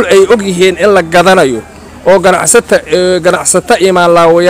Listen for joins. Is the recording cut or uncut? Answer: uncut